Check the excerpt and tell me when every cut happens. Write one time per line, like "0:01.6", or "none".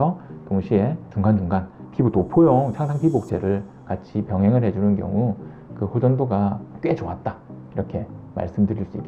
0:01.8